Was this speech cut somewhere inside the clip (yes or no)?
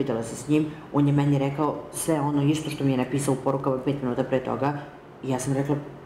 no